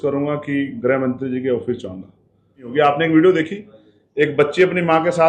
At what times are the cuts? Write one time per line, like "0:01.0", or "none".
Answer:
0:02.7